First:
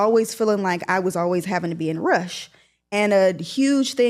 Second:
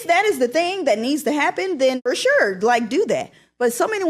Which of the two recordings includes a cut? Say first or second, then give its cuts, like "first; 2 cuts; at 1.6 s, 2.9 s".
second; 1 cut; at 2.0 s